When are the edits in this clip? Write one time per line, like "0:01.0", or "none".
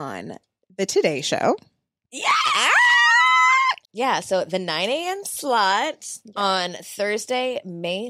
0:03.9